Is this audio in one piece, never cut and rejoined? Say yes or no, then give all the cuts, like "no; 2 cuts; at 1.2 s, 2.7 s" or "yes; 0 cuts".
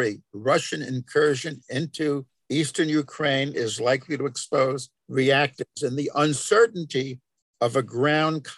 no; 2 cuts; at 2.3 s, 4.9 s